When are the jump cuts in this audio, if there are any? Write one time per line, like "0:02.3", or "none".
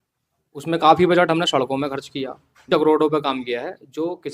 0:02.7